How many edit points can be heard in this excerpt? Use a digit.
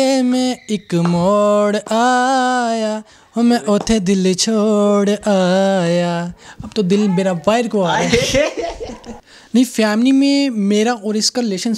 1